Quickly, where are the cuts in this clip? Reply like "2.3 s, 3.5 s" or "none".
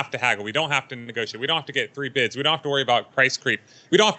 none